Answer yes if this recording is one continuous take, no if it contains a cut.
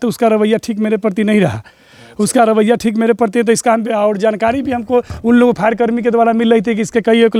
yes